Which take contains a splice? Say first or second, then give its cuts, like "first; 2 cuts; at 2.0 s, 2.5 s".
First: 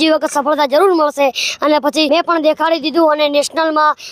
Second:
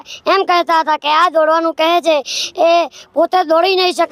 first; 1 cut; at 2.1 s